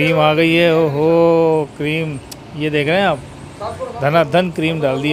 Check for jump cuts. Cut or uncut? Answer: uncut